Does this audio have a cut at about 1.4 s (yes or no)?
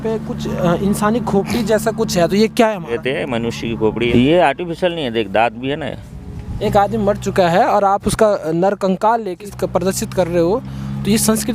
no